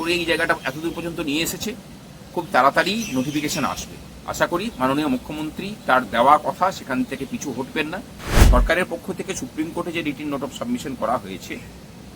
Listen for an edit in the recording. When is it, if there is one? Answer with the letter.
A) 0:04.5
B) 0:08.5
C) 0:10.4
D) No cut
B